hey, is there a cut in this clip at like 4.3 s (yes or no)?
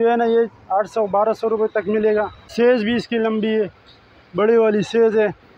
no